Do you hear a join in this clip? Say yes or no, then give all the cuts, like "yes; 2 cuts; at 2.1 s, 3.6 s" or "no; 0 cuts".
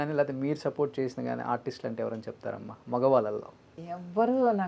yes; 1 cut; at 3.7 s